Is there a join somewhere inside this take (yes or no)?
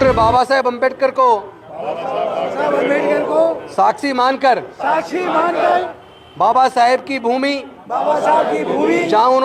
no